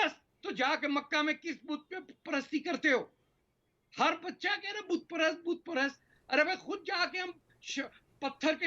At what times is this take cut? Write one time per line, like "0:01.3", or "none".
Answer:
none